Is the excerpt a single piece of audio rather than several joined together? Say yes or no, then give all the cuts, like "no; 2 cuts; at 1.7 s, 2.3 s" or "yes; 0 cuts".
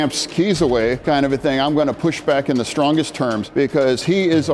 no; 2 cuts; at 1.0 s, 3.4 s